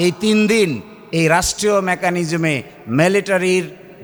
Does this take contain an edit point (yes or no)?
no